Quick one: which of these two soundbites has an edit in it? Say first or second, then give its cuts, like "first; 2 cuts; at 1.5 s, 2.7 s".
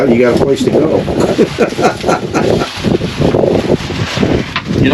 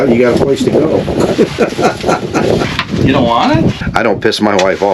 second; 2 cuts; at 2.7 s, 3.8 s